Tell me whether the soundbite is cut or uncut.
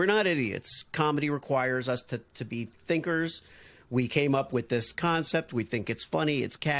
uncut